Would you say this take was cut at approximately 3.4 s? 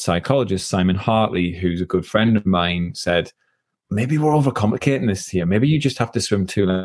no; 0 cuts

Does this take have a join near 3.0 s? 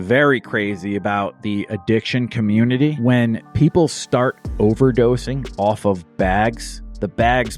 yes; 1 cut; at 3.0 s

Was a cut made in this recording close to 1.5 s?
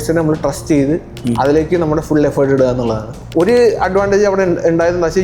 no; 1 cut; at 3.2 s

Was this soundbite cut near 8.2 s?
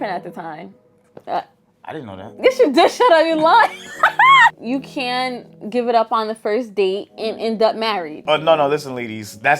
yes; 2 cuts; at 4.6 s, 8.2 s

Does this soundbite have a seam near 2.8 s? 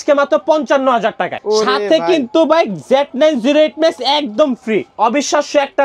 no; 2 cuts; at 1.4 s, 4.9 s

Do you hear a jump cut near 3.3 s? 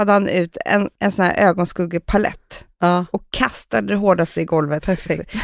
no; 1 cut; at 0.9 s

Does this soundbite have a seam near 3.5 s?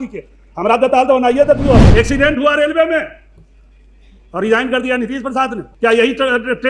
no; 2 cuts; at 1.9 s, 5.6 s

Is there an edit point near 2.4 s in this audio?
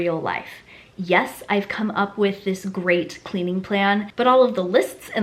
no; 1 cut; at 4.2 s

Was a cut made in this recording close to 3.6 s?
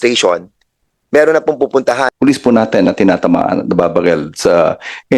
no; 1 cut; at 2.1 s

